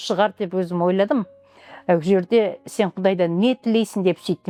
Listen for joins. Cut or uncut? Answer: uncut